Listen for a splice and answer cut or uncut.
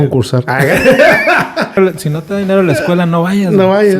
cut